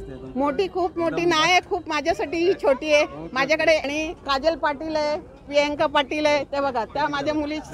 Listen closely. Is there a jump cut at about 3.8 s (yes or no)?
yes